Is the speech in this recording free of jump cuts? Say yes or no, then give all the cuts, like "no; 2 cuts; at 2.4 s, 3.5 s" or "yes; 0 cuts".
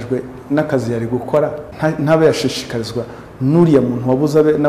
no; 1 cut; at 1.6 s